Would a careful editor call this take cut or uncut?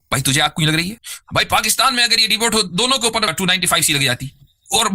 cut